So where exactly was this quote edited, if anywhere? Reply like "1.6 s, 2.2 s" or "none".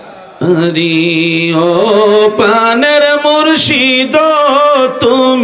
none